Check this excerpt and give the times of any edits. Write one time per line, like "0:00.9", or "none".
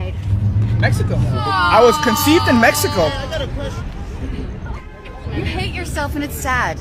none